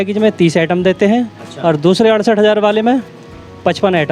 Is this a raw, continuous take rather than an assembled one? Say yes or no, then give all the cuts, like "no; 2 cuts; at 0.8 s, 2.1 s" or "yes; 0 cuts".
yes; 0 cuts